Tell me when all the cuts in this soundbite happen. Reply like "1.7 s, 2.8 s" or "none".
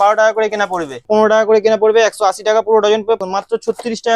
1.0 s, 3.2 s